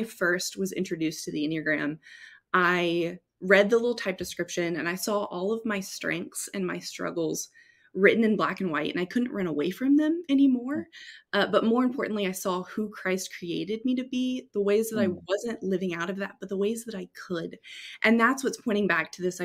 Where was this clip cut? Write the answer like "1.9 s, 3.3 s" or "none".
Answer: none